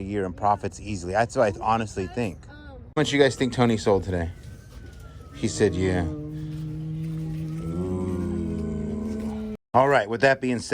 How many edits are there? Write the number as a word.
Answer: two